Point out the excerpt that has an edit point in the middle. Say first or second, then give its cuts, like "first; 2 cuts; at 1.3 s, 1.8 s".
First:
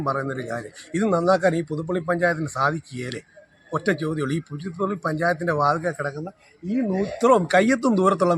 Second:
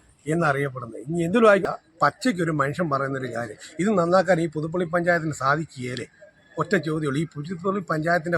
second; 1 cut; at 1.6 s